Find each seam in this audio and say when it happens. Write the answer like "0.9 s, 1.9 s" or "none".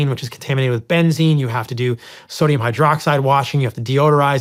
none